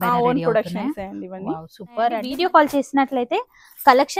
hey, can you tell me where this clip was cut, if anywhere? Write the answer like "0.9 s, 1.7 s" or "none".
2.2 s